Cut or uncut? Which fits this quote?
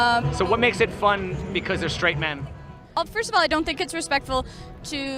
cut